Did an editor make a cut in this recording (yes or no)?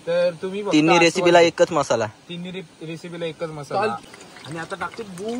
yes